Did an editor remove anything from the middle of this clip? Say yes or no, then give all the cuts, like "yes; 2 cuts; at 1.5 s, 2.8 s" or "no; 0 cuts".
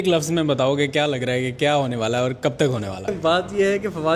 yes; 1 cut; at 3.1 s